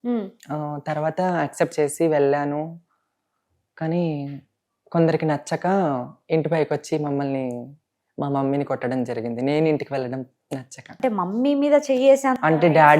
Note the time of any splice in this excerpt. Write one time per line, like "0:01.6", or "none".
0:11.0